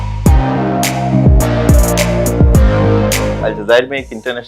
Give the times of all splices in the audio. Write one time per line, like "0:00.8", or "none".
0:03.4